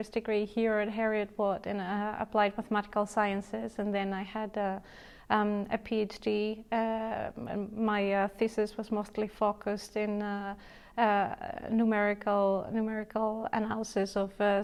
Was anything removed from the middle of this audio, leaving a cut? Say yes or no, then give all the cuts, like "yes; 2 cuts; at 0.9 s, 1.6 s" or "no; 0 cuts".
no; 0 cuts